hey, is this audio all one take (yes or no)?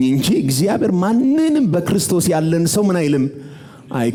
yes